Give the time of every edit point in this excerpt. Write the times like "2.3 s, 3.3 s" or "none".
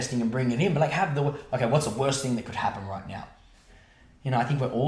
3.5 s